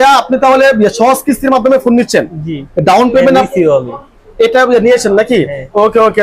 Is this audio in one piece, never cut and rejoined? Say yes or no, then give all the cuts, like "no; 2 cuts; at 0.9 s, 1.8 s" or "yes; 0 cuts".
yes; 0 cuts